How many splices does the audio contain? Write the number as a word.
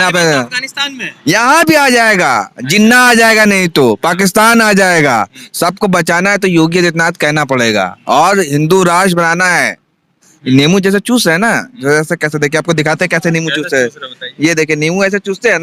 zero